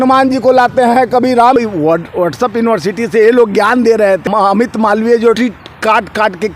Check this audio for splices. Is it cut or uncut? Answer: cut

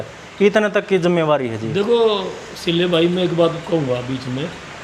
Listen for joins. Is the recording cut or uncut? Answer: uncut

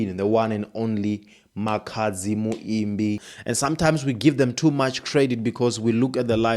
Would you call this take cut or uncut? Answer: cut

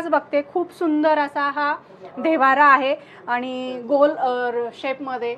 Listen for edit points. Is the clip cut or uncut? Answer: uncut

